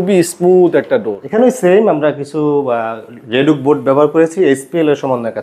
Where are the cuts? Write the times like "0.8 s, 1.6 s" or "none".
1.2 s